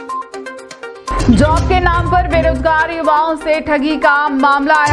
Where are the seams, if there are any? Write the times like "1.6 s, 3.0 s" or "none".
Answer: 1.1 s